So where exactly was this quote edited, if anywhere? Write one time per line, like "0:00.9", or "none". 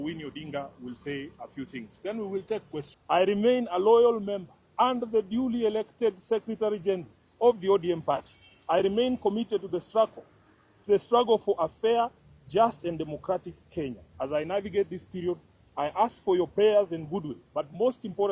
0:02.9